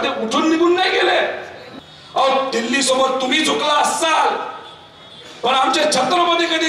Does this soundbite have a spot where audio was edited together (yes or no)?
yes